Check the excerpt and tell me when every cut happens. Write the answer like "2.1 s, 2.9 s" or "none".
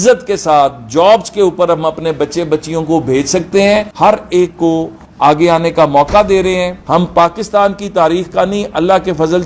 3.9 s, 6.8 s